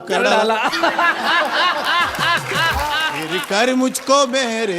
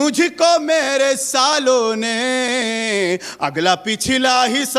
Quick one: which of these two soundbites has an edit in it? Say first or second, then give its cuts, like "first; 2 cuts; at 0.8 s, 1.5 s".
first; 1 cut; at 3.3 s